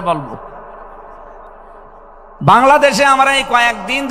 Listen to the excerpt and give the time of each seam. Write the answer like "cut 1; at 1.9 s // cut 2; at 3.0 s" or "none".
cut 1; at 2.3 s